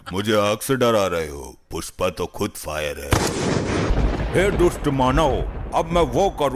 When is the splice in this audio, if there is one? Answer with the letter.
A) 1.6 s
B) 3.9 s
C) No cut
B